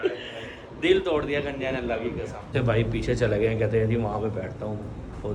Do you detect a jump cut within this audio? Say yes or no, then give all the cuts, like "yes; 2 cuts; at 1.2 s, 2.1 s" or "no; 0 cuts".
yes; 1 cut; at 2.5 s